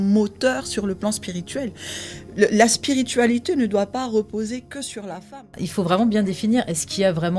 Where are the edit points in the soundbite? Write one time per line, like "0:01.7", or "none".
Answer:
0:05.5